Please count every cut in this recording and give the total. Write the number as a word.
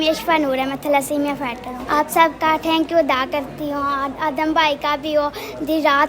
one